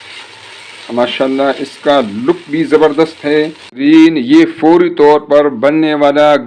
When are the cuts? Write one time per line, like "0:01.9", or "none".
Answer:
0:03.6

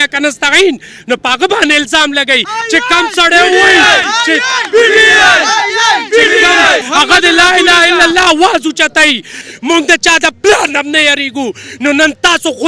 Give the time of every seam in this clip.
0:06.8
0:09.4

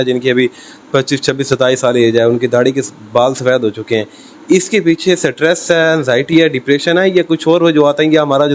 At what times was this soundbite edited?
none

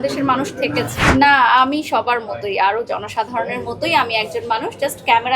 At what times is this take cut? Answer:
0:01.0

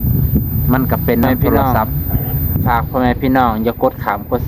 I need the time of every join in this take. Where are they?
0:02.7

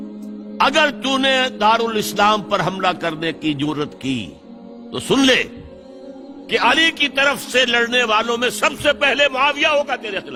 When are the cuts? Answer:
none

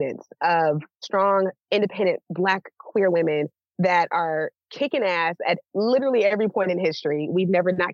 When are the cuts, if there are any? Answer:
0:00.9

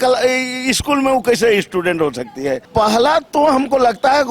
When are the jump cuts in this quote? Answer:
0:02.7

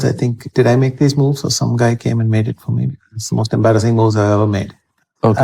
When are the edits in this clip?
none

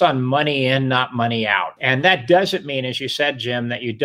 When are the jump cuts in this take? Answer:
0:01.7

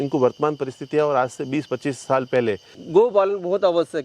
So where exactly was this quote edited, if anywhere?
0:02.7

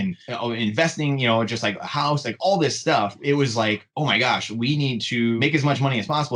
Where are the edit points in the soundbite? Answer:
0:03.2
0:05.4

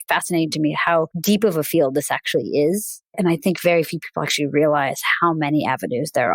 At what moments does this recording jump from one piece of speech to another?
0:01.1
0:03.0

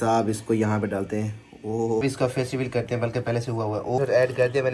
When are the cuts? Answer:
0:02.0
0:04.0

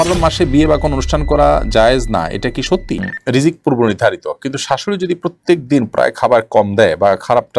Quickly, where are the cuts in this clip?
0:03.0

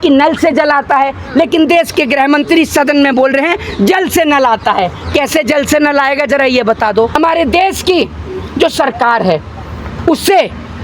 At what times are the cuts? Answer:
0:07.1

